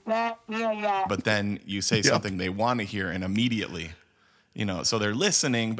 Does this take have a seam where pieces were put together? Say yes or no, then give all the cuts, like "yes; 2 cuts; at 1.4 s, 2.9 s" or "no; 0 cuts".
no; 0 cuts